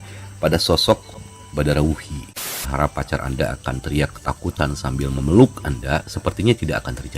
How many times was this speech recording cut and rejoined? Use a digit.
1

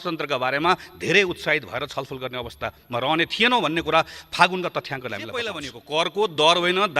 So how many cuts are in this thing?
1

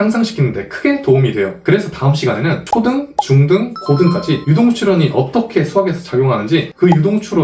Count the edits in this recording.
0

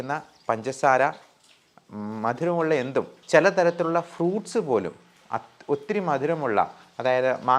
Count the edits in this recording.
1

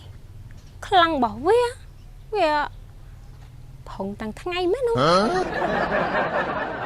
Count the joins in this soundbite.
1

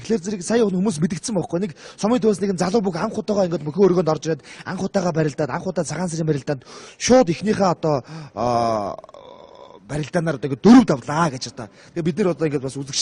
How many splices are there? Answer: 0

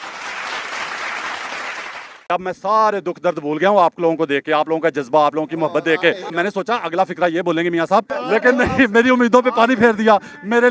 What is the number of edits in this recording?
3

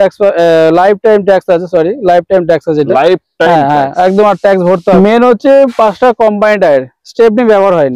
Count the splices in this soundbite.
1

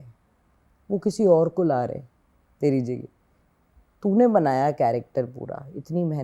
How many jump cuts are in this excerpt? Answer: 0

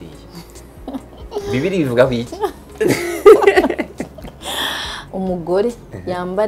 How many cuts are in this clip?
1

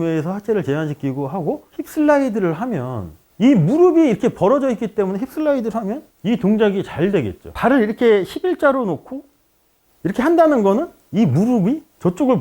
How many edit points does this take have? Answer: 1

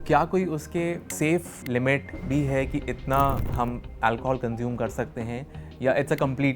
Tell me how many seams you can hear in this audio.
2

